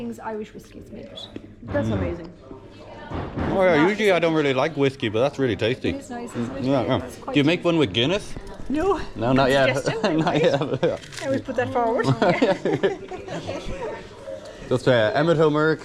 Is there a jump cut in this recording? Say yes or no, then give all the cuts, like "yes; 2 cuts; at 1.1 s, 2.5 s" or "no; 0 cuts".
no; 0 cuts